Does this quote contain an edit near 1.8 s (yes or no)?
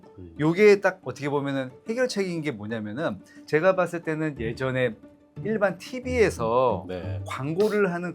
no